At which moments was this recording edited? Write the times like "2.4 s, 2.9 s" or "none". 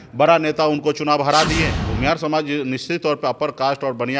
1.8 s